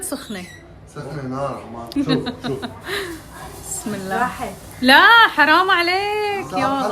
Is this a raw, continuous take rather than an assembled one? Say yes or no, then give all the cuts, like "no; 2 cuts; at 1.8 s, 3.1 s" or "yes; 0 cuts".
no; 1 cut; at 1.9 s